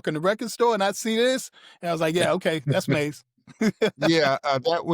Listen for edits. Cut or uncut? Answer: uncut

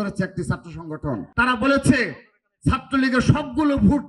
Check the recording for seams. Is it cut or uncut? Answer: cut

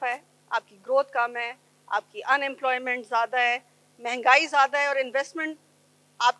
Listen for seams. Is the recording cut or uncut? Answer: uncut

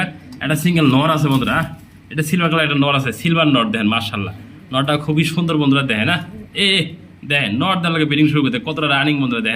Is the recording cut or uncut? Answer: uncut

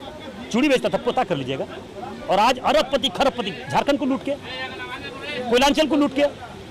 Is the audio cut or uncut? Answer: uncut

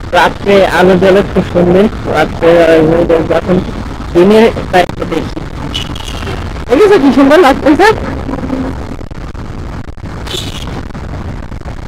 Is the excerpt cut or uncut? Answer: uncut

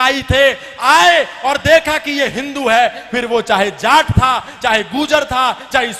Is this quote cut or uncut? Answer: uncut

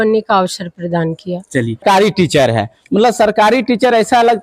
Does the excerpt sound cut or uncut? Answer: cut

